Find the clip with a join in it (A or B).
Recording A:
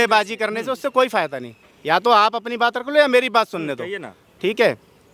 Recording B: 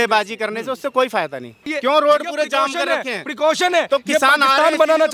B